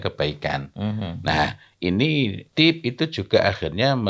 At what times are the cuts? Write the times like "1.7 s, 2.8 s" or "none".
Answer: 2.5 s